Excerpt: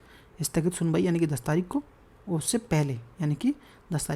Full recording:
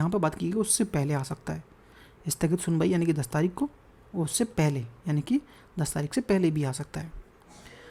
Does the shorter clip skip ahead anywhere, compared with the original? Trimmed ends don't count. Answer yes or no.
no